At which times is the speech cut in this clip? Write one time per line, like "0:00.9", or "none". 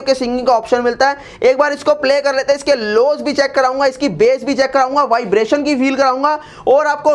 none